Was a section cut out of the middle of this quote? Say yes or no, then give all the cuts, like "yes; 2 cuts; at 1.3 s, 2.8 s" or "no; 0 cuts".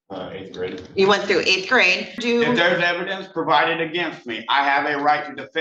yes; 1 cut; at 2.2 s